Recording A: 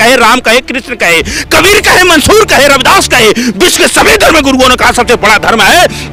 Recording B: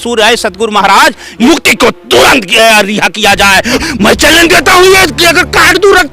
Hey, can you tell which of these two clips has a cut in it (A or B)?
B